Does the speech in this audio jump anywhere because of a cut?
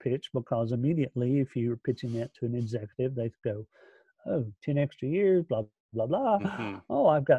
no; 0 cuts

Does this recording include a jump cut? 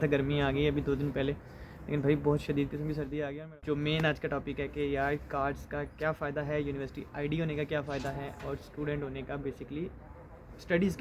yes; 1 cut; at 3.2 s

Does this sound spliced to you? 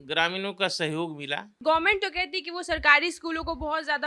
no; 0 cuts

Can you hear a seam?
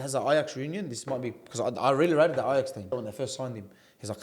yes; 1 cut; at 2.9 s

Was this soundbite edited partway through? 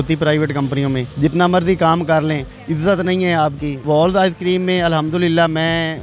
yes; 2 cuts; at 1.1 s, 3.8 s

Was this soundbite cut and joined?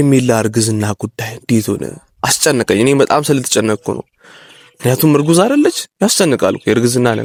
no; 0 cuts

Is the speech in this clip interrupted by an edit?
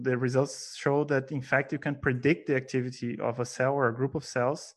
no; 0 cuts

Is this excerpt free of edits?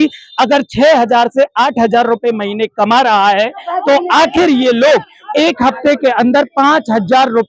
yes; 0 cuts

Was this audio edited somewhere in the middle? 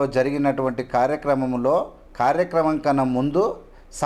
no; 0 cuts

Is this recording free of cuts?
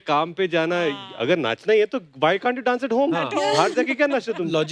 yes; 0 cuts

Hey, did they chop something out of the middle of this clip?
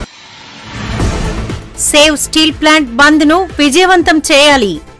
yes; 1 cut; at 1.2 s

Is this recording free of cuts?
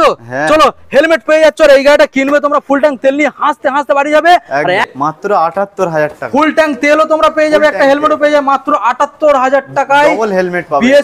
no; 1 cut; at 4.8 s

